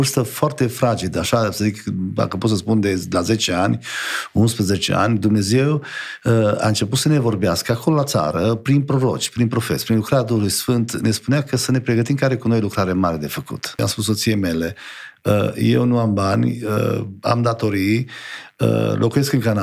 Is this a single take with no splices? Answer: no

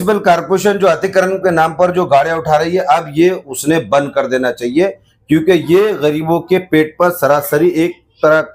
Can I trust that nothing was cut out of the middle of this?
yes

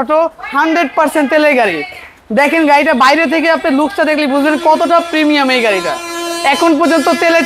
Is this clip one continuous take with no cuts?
yes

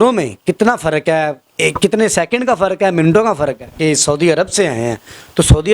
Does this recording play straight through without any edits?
no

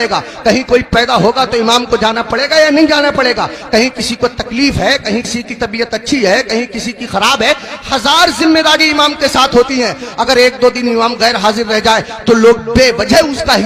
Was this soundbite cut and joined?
no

